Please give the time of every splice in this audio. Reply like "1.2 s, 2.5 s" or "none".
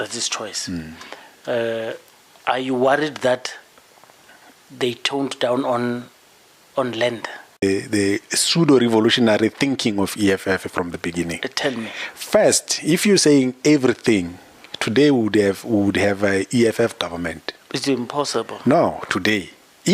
7.6 s

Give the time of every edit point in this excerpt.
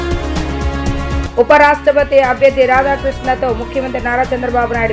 1.2 s

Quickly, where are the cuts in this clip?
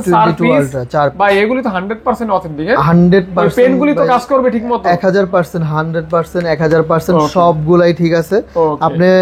none

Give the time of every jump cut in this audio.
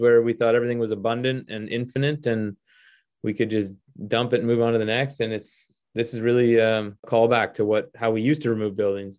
7.1 s

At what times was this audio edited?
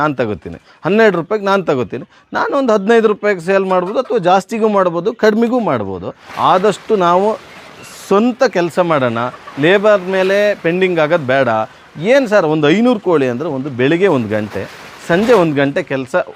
none

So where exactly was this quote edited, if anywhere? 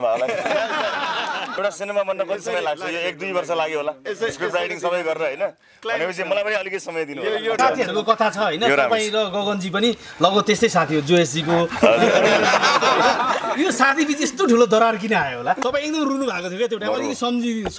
1.6 s, 7.6 s, 15.6 s

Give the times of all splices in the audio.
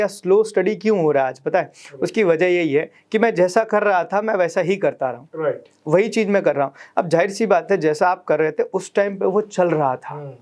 none

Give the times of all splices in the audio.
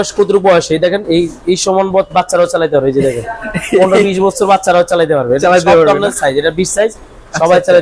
none

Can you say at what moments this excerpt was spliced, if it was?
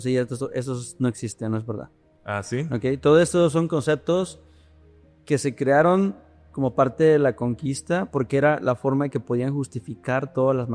none

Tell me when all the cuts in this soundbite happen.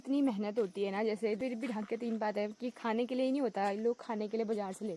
1.4 s

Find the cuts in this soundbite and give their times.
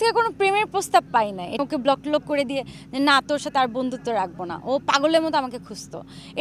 1.6 s

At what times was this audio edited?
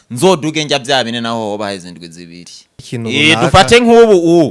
2.8 s

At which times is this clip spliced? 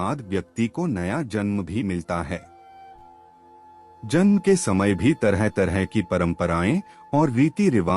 2.4 s, 3.8 s

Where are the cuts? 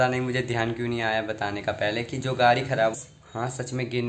3.0 s

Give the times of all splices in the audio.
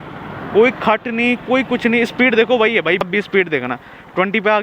3.0 s

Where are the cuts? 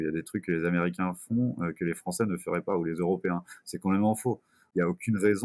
4.5 s

